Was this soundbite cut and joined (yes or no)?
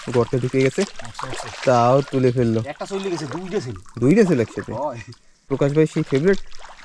yes